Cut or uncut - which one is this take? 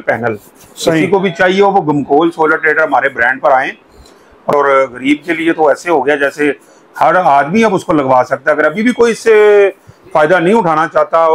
cut